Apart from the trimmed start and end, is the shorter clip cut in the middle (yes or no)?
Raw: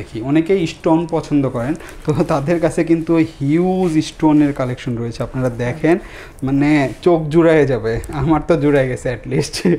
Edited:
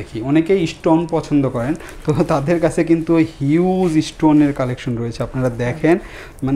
no